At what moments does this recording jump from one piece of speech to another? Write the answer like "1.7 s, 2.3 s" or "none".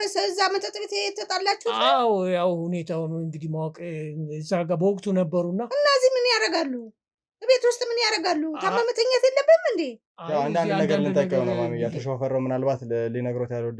none